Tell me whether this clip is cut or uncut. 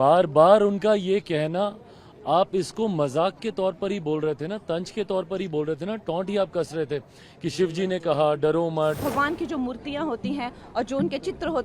cut